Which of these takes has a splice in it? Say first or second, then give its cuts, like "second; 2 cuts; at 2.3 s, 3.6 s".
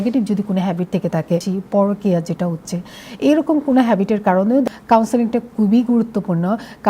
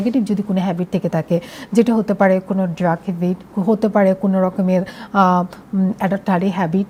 first; 2 cuts; at 1.5 s, 4.7 s